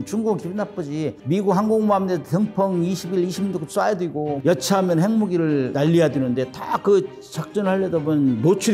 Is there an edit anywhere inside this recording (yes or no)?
no